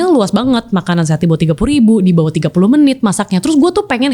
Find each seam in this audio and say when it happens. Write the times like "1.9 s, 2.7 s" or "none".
none